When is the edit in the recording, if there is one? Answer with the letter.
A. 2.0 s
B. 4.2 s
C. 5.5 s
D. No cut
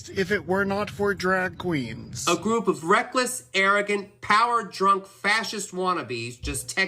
A